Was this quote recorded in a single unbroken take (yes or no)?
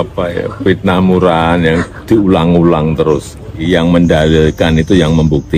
no